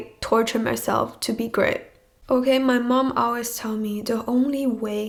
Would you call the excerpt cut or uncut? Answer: uncut